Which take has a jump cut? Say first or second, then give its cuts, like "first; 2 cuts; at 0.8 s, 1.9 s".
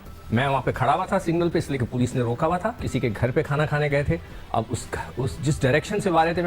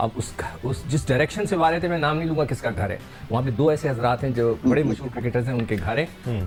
first; 1 cut; at 2.8 s